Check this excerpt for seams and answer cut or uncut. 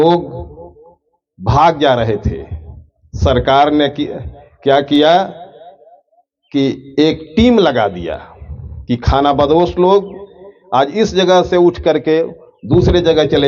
uncut